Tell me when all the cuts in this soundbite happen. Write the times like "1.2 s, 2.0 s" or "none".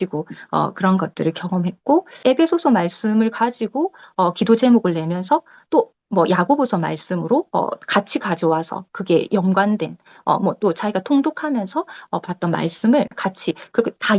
2.2 s